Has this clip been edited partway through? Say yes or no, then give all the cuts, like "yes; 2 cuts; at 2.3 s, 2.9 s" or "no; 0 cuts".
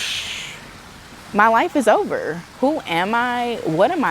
yes; 2 cuts; at 1.1 s, 2.4 s